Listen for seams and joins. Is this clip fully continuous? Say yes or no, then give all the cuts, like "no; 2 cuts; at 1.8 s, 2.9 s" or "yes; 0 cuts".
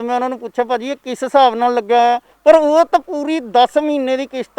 no; 1 cut; at 2.3 s